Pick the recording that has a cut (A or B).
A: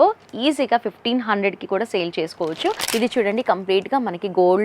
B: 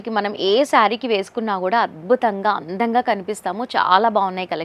A